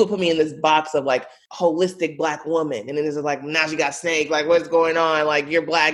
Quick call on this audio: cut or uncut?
cut